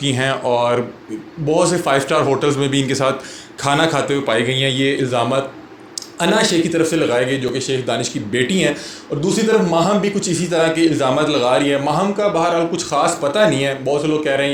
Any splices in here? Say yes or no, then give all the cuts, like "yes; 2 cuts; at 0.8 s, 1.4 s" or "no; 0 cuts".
no; 0 cuts